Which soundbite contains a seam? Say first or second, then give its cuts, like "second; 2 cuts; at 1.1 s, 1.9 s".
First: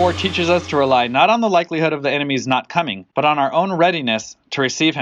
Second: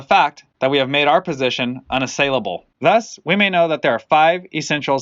second; 1 cut; at 2.7 s